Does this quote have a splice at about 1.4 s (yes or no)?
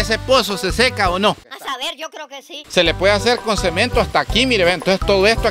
no